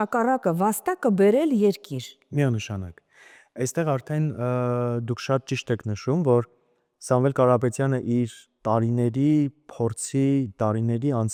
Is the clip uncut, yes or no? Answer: yes